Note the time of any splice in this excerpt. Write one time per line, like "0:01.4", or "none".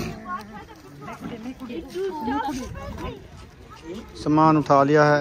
0:03.2